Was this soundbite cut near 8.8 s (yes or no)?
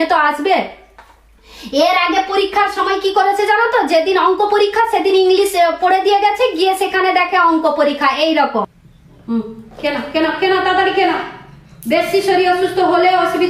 yes